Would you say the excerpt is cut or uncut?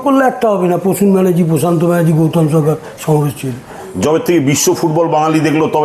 cut